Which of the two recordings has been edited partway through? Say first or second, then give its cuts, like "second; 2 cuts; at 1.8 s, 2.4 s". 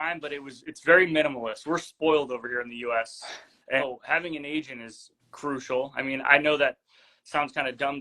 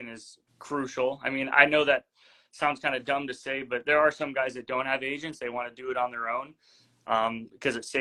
first; 1 cut; at 3.8 s